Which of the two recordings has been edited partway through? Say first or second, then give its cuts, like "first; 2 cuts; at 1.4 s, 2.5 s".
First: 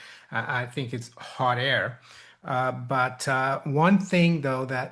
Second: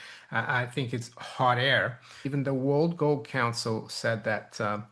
second; 1 cut; at 2.3 s